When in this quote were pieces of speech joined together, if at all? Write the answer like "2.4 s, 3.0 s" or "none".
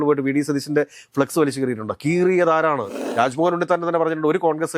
3.0 s